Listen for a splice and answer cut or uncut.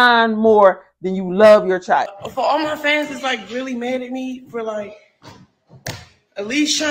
cut